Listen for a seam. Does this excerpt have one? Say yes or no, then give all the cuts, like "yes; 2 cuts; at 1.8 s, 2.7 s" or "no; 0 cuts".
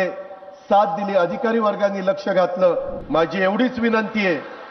yes; 1 cut; at 2.9 s